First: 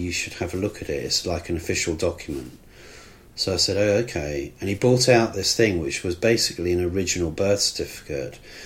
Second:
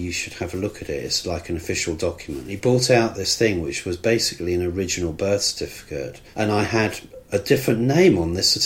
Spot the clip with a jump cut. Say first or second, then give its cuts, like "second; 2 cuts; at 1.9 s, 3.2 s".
second; 2 cuts; at 2.5 s, 6.2 s